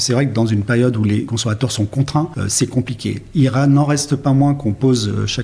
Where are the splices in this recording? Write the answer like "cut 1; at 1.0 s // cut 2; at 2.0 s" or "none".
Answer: cut 1; at 1.3 s // cut 2; at 2.4 s